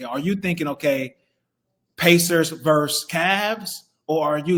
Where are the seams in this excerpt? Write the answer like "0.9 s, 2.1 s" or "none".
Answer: none